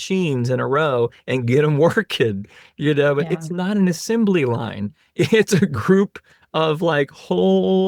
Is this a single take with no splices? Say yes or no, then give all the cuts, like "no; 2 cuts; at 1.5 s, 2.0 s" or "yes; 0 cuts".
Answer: yes; 0 cuts